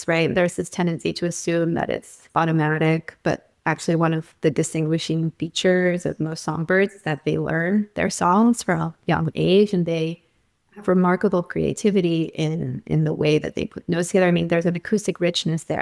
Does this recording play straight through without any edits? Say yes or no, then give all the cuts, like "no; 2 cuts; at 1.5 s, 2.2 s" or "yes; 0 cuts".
no; 1 cut; at 2.2 s